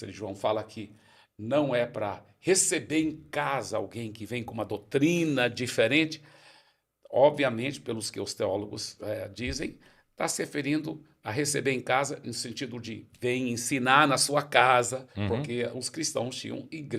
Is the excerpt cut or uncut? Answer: uncut